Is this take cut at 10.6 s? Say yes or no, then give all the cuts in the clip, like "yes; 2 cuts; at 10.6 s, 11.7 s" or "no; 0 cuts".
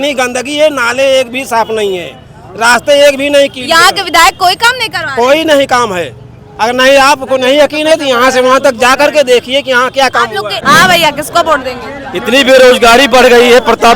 yes; 1 cut; at 10.6 s